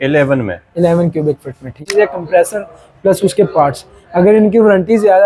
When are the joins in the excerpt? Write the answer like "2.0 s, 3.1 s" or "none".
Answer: 1.8 s